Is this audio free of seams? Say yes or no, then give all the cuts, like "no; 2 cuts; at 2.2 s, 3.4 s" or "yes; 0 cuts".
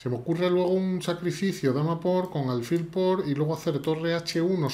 yes; 0 cuts